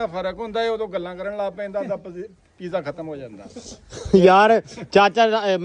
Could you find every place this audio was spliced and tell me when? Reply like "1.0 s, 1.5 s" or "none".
none